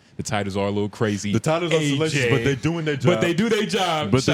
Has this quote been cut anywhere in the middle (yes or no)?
no